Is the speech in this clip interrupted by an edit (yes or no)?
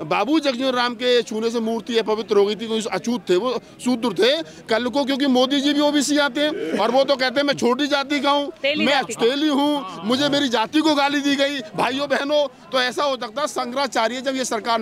no